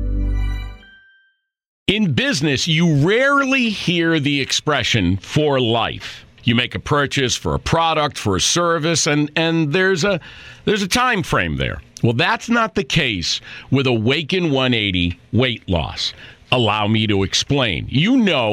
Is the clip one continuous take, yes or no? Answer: no